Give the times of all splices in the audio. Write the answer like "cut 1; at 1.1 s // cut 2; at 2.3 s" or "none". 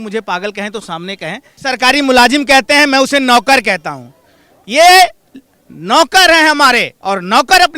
cut 1; at 1.5 s